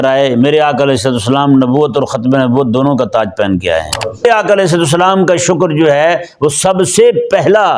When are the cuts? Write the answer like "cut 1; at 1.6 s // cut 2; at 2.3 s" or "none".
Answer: cut 1; at 4.2 s